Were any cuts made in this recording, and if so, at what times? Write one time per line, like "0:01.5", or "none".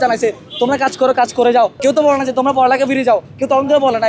0:01.8